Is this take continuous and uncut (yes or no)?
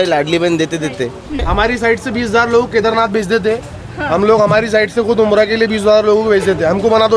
no